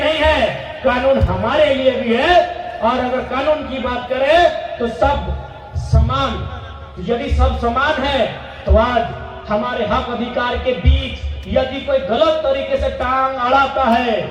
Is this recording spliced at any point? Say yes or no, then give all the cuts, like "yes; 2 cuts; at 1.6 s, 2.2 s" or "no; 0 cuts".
no; 0 cuts